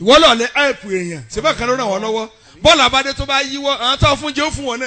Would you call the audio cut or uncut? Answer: uncut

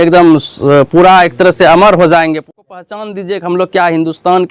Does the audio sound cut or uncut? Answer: cut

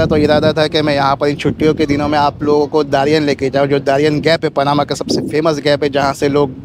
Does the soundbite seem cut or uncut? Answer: uncut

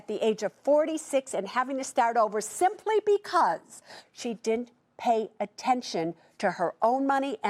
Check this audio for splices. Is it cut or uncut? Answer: uncut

